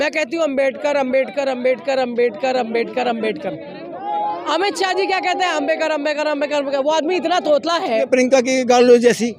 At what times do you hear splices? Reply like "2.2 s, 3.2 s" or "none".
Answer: 8.1 s